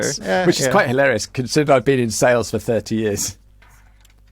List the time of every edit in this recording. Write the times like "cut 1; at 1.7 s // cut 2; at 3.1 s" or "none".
none